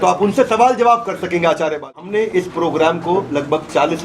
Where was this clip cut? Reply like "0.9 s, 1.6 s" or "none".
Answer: 2.2 s